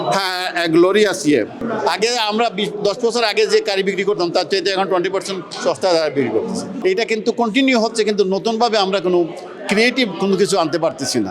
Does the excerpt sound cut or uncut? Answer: cut